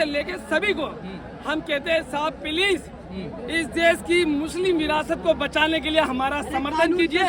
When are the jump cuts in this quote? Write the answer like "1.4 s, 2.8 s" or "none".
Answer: none